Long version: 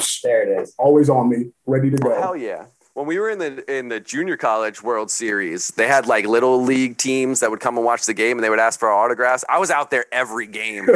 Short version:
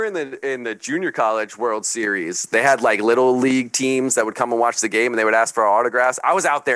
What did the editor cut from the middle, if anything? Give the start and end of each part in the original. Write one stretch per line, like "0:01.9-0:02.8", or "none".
none